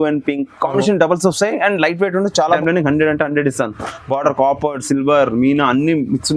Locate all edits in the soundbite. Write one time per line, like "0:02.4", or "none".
0:02.4